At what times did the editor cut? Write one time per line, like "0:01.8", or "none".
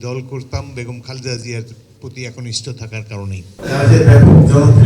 0:03.5

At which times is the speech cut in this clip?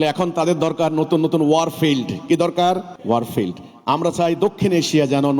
0:02.9

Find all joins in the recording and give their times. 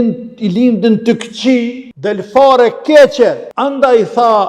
0:01.9
0:03.5

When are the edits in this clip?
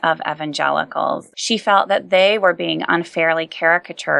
0:01.3

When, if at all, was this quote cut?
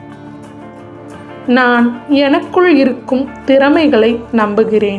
0:01.5

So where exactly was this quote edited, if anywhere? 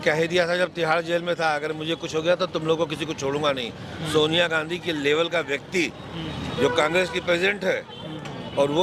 none

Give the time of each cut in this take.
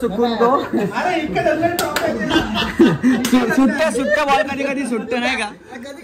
none

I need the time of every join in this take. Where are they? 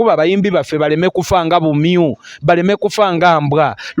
none

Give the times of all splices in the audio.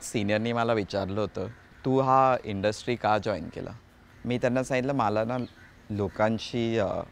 none

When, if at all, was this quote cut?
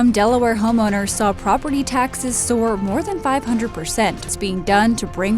0:04.3

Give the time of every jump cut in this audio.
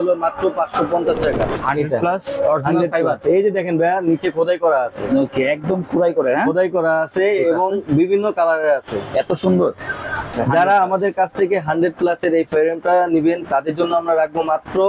0:01.5
0:10.3

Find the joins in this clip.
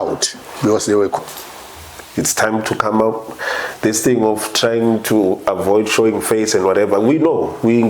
0:01.2

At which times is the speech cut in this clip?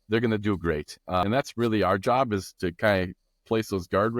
0:01.2

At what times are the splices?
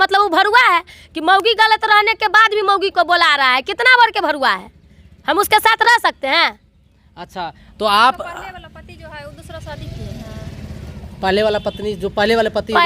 none

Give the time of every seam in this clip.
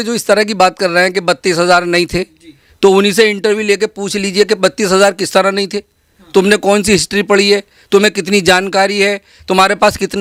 none

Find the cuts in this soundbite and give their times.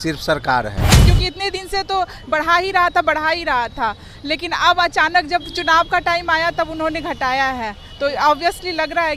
0:01.0

